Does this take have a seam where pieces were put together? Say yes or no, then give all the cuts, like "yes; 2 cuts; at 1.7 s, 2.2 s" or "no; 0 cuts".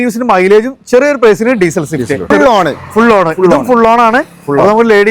yes; 1 cut; at 2.3 s